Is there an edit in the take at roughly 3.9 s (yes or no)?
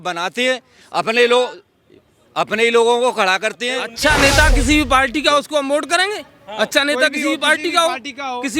yes